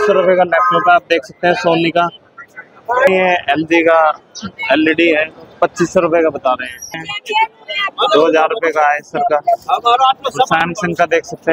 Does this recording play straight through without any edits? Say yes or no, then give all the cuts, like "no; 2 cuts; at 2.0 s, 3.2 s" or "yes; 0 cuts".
no; 2 cuts; at 3.1 s, 7.1 s